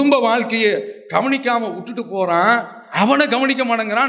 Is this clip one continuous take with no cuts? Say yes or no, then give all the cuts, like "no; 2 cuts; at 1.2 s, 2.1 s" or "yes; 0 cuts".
yes; 0 cuts